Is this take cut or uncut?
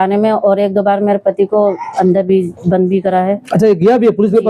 uncut